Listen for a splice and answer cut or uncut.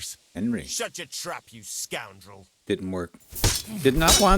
cut